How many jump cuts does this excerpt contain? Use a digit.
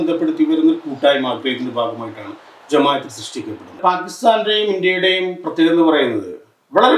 1